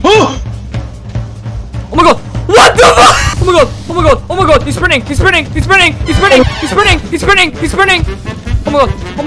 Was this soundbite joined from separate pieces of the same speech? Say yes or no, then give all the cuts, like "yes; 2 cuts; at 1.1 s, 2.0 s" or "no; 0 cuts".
no; 0 cuts